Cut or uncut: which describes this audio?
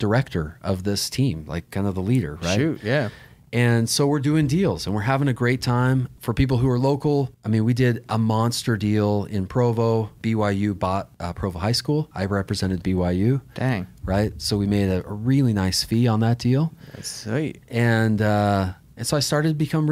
cut